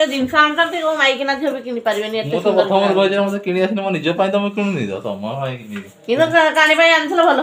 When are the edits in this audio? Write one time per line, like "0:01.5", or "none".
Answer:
none